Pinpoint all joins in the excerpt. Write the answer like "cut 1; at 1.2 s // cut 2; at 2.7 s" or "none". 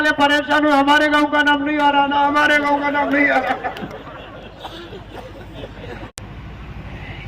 cut 1; at 6.1 s